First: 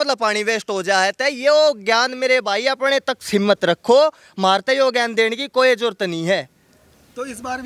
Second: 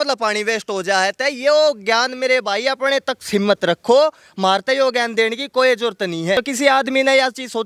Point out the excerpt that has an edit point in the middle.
second; 1 cut; at 6.4 s

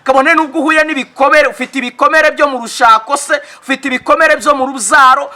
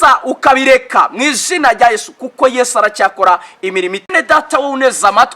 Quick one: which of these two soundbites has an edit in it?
second; 1 cut; at 4.1 s

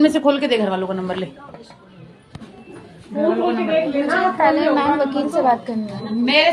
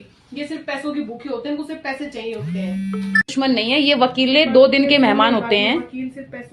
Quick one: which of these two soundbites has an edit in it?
second; 1 cut; at 3.7 s

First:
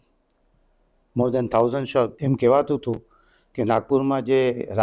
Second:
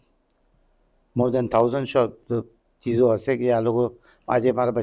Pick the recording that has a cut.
first; 1 cut; at 2.2 s

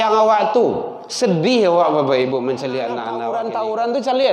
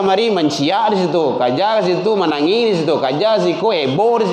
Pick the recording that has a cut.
first; 1 cut; at 3.2 s

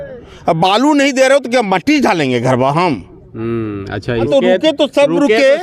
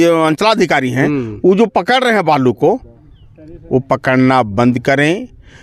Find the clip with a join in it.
first; 1 cut; at 4.3 s

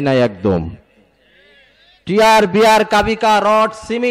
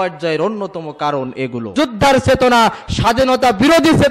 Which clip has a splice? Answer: second; 1 cut; at 1.7 s

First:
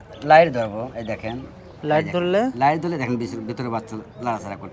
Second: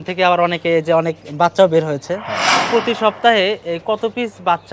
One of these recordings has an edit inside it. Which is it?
second; 1 cut; at 2.6 s

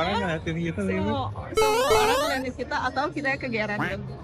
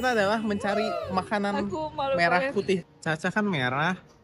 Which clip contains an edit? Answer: second; 1 cut; at 2.8 s

